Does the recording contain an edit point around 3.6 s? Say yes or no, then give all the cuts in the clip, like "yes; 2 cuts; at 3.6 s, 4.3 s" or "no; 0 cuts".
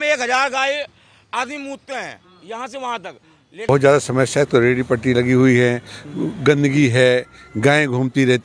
yes; 1 cut; at 3.6 s